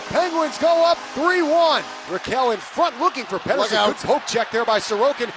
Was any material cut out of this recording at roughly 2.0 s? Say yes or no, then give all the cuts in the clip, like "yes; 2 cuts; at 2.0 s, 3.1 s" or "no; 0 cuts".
yes; 1 cut; at 2.0 s